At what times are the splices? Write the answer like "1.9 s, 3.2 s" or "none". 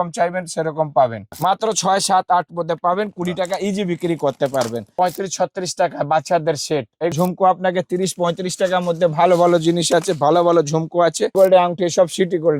1.3 s, 4.9 s, 7.1 s, 11.3 s

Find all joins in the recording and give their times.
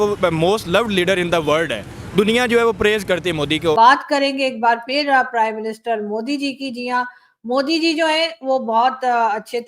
3.8 s

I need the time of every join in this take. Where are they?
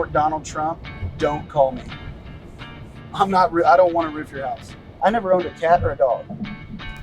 5.0 s

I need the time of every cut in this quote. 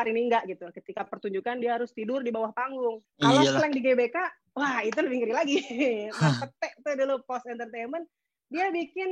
3.1 s

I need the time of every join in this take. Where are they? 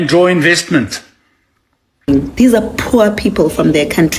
2.1 s

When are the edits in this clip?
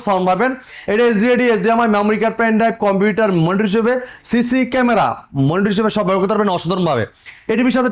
none

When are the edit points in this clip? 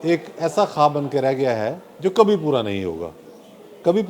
none

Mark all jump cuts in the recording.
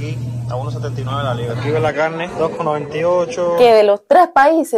3.6 s

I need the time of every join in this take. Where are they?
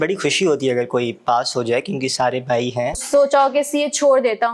3.0 s

